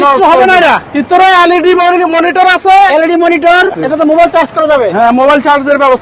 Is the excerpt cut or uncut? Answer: cut